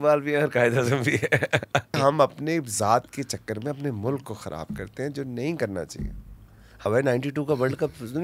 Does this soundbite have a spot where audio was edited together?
yes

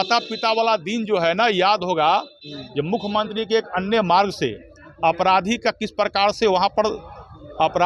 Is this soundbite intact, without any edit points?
yes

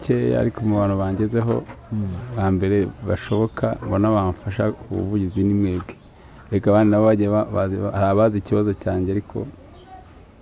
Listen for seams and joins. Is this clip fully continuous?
yes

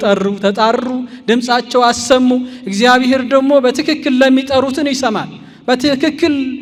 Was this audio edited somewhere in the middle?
no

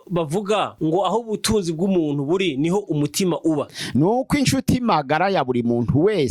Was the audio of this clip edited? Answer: no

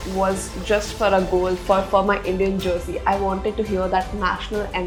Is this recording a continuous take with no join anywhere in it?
yes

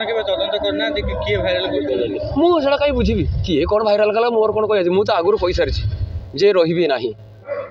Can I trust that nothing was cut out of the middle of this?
yes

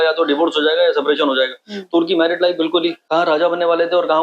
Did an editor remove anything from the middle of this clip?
yes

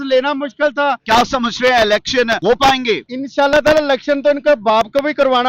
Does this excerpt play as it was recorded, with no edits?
no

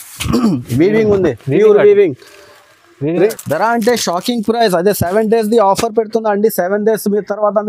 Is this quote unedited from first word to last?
no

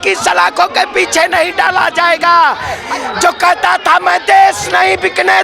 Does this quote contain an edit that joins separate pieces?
yes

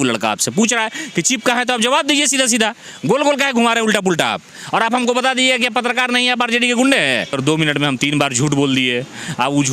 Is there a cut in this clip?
yes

